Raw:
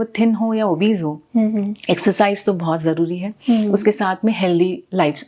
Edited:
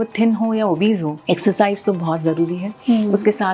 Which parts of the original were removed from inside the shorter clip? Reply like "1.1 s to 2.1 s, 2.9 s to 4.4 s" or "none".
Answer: 1.2 s to 1.8 s